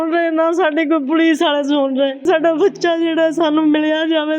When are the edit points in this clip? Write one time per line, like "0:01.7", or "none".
0:02.2